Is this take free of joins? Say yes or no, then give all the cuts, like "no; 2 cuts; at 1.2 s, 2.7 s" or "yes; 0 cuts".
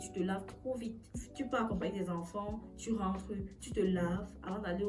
no; 1 cut; at 1.0 s